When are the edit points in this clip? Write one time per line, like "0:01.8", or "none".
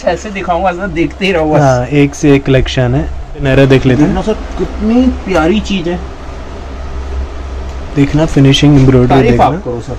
0:03.4